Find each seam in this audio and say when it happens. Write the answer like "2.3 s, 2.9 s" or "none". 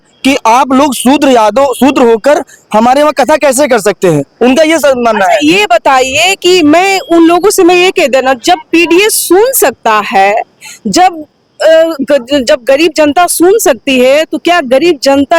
none